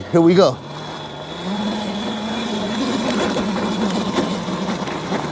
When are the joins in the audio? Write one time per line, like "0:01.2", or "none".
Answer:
none